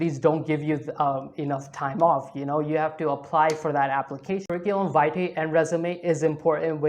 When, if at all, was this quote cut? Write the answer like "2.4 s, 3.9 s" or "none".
4.5 s